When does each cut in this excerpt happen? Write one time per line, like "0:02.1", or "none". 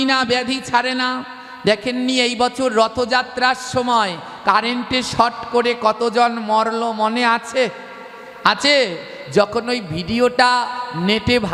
none